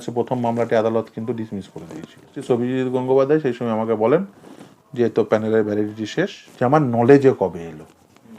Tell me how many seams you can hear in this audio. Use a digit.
2